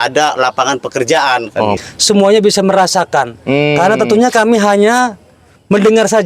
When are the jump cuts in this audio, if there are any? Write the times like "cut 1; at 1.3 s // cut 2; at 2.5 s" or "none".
cut 1; at 1.8 s